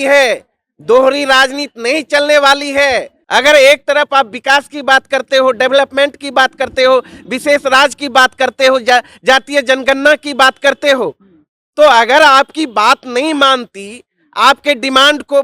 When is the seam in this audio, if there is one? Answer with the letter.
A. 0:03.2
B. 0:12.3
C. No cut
A